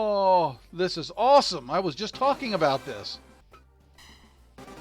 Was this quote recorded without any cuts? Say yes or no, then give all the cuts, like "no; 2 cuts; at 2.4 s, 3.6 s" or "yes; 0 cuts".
no; 1 cut; at 3.4 s